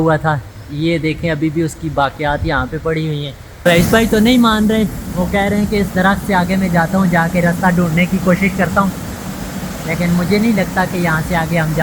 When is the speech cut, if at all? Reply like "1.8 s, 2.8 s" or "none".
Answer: 3.6 s